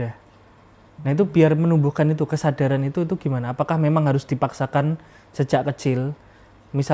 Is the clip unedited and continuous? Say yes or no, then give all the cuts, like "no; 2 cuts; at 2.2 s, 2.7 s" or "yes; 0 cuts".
yes; 0 cuts